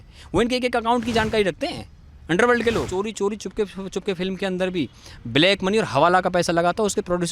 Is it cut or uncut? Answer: cut